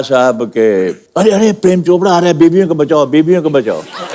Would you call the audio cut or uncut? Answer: cut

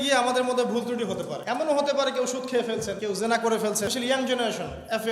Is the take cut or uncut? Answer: cut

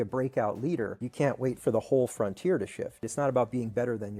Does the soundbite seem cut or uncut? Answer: cut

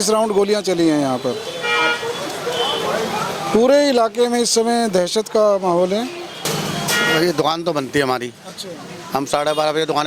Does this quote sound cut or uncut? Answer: uncut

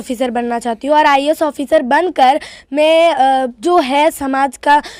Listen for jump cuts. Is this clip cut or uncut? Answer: uncut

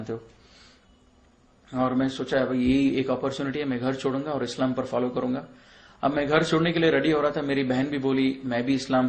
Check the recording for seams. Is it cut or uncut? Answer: uncut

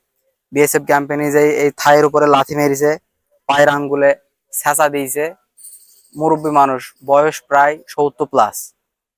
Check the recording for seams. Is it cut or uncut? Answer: uncut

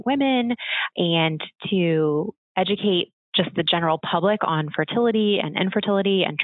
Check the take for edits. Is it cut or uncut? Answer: cut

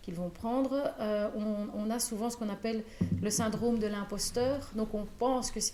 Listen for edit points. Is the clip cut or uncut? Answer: uncut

